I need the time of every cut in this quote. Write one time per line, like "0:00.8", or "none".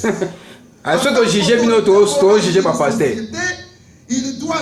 none